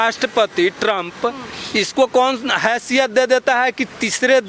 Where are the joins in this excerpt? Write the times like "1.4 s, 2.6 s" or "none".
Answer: none